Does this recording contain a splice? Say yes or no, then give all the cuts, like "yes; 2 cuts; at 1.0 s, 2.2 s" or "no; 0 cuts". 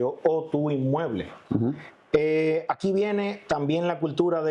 no; 0 cuts